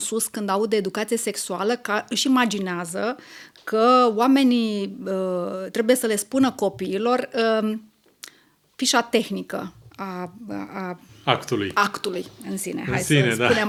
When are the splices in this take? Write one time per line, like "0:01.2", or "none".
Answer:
none